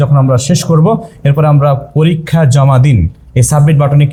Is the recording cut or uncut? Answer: uncut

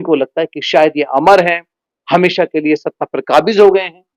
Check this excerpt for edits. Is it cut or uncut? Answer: uncut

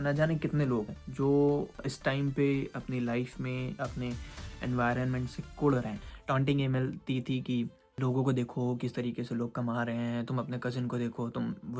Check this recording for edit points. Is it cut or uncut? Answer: cut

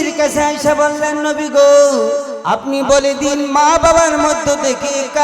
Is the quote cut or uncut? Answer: cut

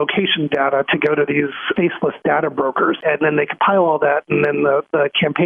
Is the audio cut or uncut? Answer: cut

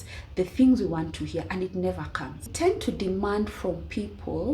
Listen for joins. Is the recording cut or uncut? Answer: cut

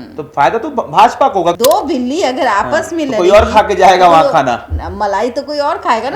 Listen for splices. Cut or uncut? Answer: cut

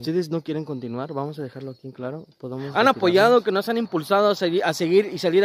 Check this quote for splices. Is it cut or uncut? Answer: cut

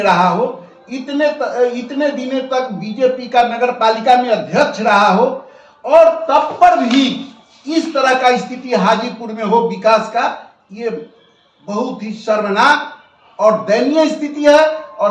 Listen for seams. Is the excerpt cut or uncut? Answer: uncut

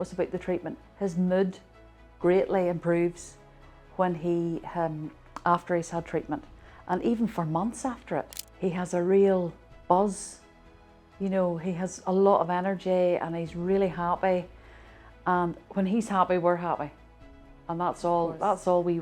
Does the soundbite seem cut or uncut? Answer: cut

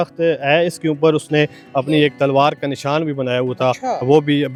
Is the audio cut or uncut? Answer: uncut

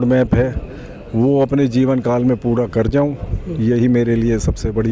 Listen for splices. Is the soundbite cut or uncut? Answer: uncut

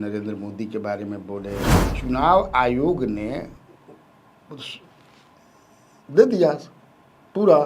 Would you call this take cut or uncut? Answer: cut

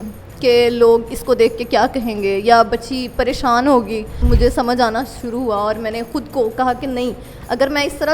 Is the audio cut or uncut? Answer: cut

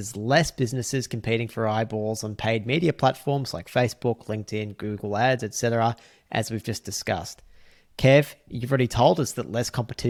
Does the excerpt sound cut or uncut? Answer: uncut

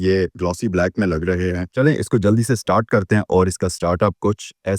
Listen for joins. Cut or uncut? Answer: cut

